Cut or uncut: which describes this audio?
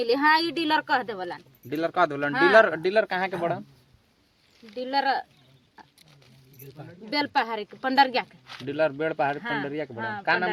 uncut